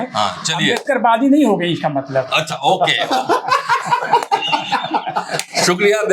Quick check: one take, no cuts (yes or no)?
yes